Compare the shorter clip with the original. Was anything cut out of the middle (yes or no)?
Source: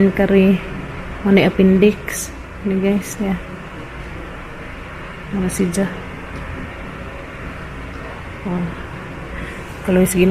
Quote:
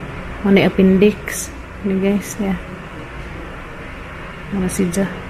no